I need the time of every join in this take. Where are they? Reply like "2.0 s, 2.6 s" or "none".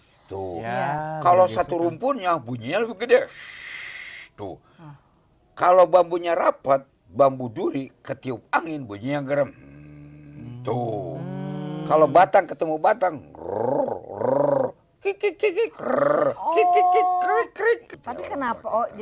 17.9 s